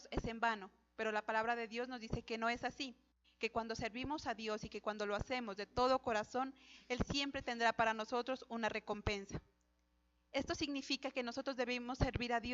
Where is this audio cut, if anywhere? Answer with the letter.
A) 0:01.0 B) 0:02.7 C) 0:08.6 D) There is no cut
C